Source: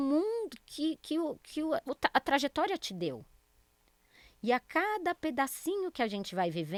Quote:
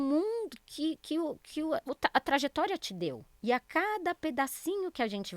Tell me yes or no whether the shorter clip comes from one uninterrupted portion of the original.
no